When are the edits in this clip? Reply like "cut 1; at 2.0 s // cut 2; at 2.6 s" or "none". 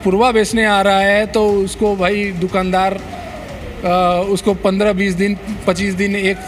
none